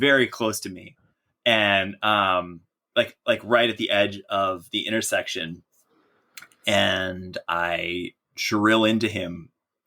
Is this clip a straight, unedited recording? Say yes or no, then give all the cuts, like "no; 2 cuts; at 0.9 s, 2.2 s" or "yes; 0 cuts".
yes; 0 cuts